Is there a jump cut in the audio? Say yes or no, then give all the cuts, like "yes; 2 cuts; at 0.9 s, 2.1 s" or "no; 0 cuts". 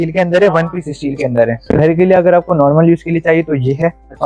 yes; 1 cut; at 1.7 s